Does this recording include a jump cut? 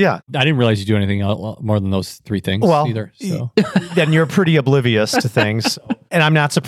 no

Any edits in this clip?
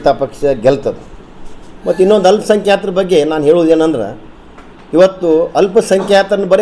no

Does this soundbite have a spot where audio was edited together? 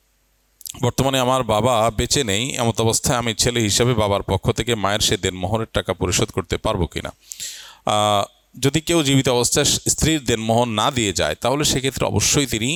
no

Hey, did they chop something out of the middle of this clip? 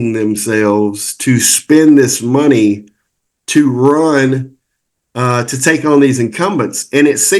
no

